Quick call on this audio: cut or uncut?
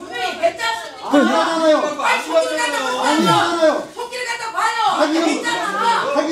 uncut